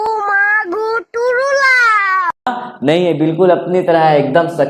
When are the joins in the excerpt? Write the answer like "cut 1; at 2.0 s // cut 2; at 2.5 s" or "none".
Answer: cut 1; at 2.5 s